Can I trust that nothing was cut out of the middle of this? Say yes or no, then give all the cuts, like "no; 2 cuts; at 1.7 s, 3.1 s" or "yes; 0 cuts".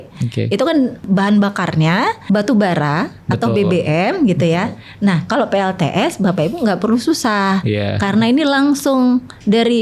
no; 2 cuts; at 1.0 s, 2.2 s